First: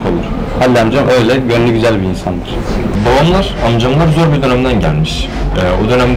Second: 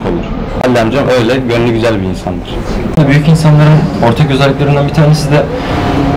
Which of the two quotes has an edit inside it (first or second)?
second